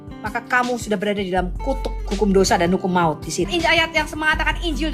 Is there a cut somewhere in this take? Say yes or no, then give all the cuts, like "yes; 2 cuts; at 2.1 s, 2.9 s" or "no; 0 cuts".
yes; 1 cut; at 3.5 s